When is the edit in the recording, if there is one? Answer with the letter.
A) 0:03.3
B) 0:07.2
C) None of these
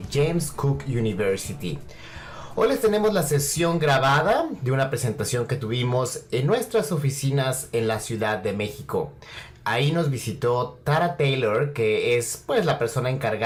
C